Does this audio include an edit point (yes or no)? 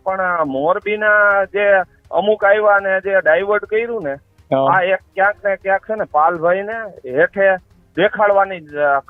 no